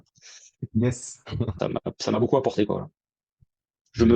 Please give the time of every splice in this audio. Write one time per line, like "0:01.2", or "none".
0:01.5